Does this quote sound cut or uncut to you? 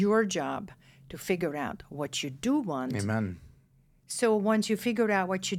uncut